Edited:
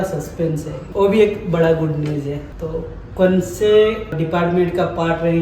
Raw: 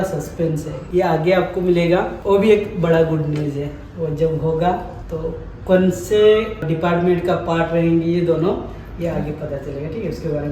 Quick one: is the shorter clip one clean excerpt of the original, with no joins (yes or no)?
no